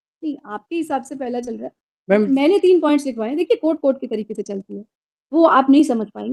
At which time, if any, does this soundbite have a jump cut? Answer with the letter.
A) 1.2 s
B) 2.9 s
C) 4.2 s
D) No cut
D